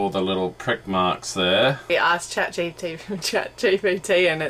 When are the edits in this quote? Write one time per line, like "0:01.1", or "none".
0:01.9